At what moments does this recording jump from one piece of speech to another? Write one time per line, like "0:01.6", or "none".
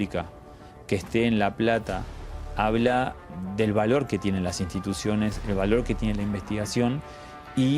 0:03.2